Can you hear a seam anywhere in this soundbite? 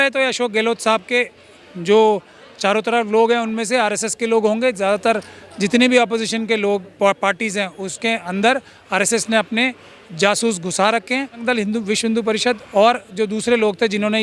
yes; 1 cut; at 11.4 s

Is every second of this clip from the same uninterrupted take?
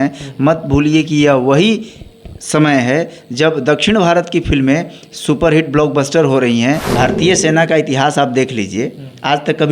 no; 1 cut; at 6.9 s

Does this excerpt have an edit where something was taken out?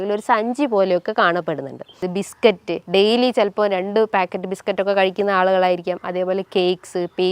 yes; 1 cut; at 2.1 s

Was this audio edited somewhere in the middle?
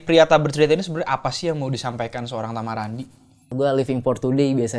yes; 1 cut; at 3.5 s

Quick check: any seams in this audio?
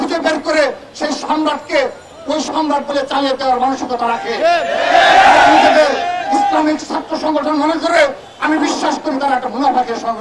no; 0 cuts

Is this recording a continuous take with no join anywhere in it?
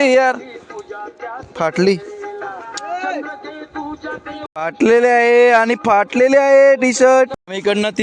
yes; 0 cuts

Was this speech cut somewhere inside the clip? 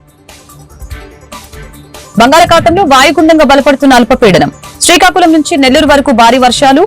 no; 0 cuts

